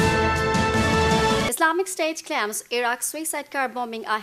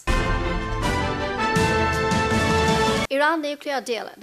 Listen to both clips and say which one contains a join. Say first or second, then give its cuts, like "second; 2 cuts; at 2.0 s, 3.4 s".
first; 1 cut; at 1.5 s